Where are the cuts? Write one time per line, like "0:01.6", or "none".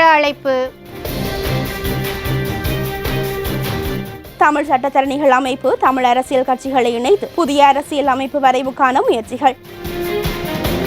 0:01.0
0:04.2
0:07.3
0:09.8